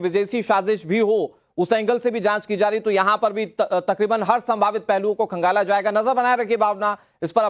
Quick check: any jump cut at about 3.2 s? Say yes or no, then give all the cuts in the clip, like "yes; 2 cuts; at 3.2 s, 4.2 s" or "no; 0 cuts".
no; 0 cuts